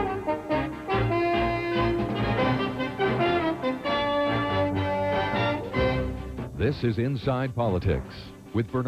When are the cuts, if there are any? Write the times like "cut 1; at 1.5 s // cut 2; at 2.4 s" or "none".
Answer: cut 1; at 5.9 s

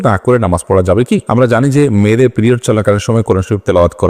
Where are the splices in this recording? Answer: cut 1; at 1.2 s

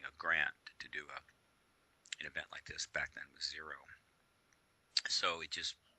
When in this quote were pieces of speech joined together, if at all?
cut 1; at 1.9 s

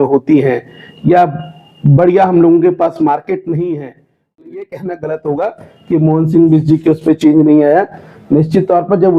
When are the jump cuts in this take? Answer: cut 1; at 4.3 s

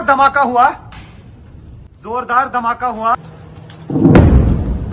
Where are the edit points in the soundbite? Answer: cut 1; at 3.1 s

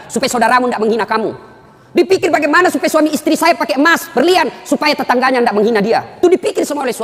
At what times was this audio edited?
none

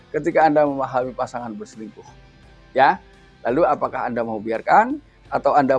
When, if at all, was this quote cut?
none

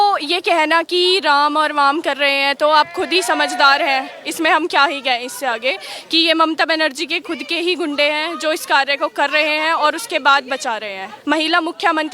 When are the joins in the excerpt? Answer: cut 1; at 11.1 s

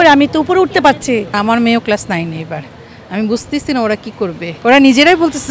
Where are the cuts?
cut 1; at 1.3 s // cut 2; at 4.5 s

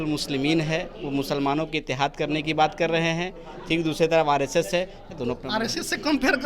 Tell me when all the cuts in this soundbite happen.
cut 1; at 5.1 s

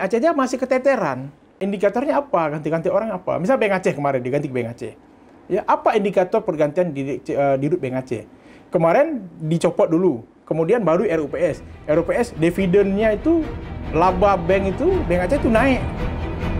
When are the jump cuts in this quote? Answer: cut 1; at 1.6 s

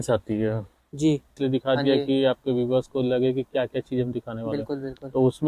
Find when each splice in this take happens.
cut 1; at 1.3 s

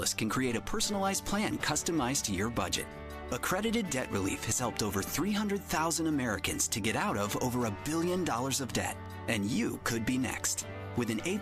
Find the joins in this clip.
none

